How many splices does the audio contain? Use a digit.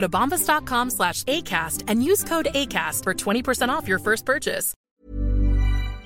1